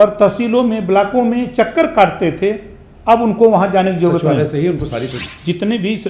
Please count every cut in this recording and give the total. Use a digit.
1